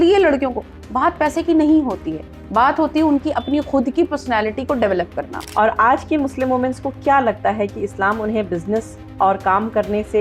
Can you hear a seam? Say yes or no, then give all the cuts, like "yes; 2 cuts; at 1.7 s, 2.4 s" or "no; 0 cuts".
yes; 1 cut; at 5.4 s